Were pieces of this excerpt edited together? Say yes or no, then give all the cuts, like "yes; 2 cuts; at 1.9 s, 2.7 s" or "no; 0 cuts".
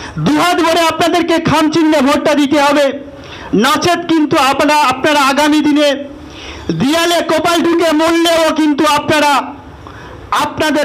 no; 0 cuts